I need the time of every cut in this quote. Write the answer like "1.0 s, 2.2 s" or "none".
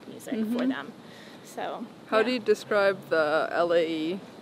none